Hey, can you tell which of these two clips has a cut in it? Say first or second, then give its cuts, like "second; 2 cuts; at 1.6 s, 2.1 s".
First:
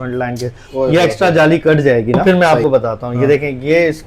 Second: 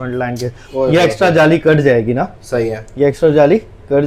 first; 1 cut; at 2.2 s